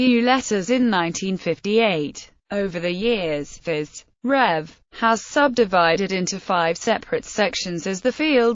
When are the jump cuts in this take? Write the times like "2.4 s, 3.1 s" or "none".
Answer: 4.8 s